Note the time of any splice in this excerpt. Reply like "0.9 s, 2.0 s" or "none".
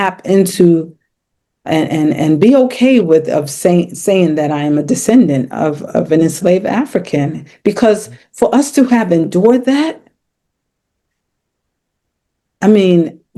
none